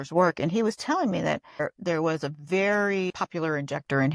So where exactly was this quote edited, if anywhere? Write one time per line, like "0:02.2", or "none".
0:01.6
0:03.1

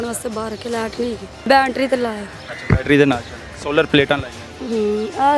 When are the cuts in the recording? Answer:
0:01.3

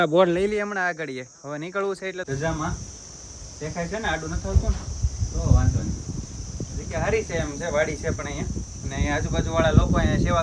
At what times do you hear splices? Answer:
0:02.3

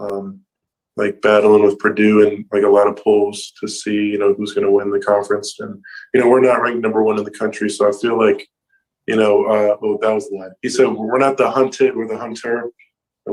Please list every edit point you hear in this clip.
none

